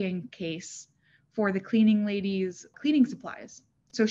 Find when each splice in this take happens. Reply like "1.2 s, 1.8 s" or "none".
2.7 s